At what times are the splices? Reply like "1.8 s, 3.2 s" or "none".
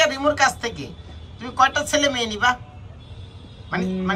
none